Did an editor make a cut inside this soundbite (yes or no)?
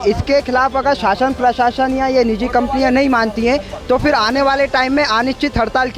no